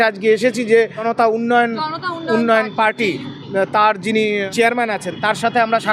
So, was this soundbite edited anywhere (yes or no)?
yes